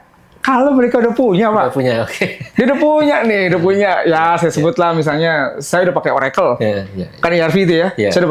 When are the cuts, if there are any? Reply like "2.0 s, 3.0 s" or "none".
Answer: none